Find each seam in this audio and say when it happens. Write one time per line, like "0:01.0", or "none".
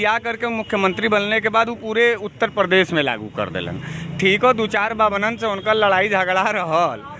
none